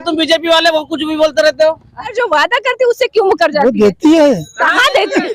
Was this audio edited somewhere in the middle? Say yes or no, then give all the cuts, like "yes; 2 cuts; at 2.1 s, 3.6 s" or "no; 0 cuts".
yes; 1 cut; at 2.1 s